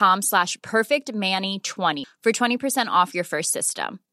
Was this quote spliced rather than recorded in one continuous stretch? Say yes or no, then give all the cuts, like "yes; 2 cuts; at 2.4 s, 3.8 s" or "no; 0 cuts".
yes; 1 cut; at 2.0 s